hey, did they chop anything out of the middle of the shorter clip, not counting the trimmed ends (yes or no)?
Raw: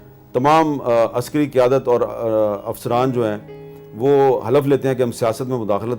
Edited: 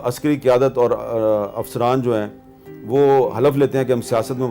no